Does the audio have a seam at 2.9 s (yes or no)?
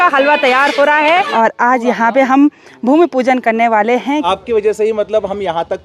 no